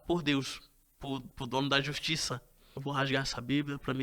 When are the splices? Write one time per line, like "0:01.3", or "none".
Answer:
0:02.7

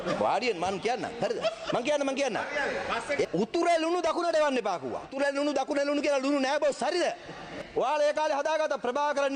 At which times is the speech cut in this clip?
0:03.2
0:05.1
0:07.5

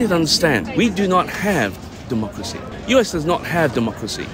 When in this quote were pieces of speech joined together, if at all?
none

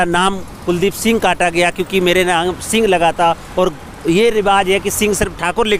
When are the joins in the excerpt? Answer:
none

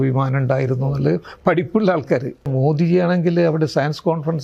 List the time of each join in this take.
0:02.5

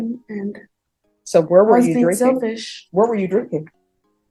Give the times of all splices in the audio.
none

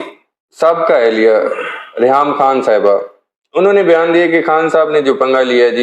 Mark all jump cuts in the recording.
none

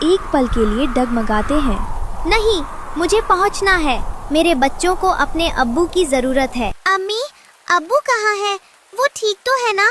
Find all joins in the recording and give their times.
0:06.8

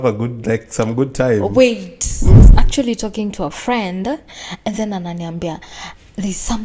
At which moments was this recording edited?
0:02.4

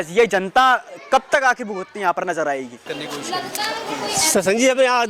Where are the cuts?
0:02.9

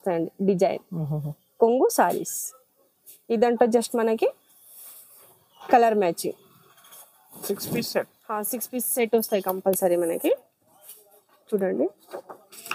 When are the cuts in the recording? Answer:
none

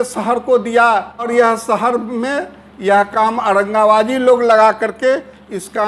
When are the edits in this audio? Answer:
0:01.3

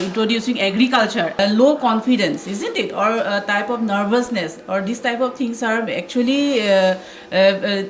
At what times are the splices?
0:01.3

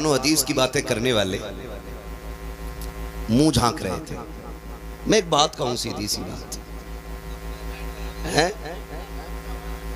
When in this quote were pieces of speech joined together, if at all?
none

